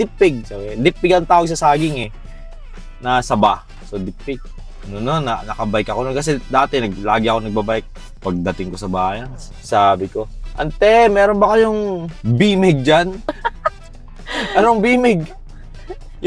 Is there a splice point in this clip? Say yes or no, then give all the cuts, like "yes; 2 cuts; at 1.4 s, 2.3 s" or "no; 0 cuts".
no; 0 cuts